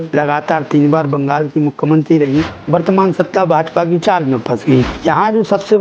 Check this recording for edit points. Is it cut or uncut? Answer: cut